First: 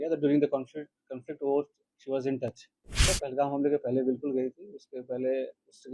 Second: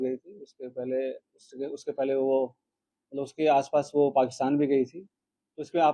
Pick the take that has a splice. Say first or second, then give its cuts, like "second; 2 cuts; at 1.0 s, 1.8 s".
first; 1 cut; at 3.1 s